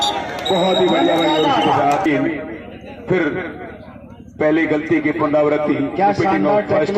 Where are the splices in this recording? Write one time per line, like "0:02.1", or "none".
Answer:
0:02.1